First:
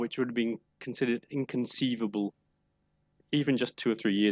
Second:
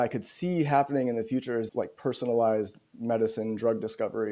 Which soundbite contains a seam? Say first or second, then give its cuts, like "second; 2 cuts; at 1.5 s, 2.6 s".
second; 1 cut; at 1.6 s